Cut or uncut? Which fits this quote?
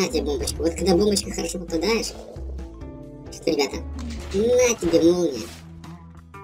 uncut